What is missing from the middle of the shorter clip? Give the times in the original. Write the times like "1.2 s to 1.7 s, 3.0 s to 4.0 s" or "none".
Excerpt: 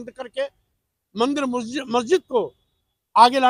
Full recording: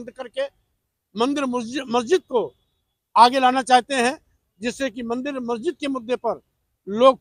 none